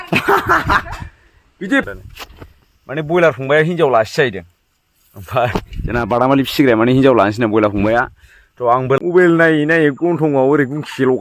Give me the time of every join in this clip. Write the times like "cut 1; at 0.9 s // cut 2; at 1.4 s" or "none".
cut 1; at 1.9 s // cut 2; at 9.0 s